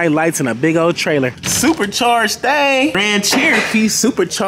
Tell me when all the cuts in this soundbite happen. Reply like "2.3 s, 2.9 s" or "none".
1.4 s, 2.9 s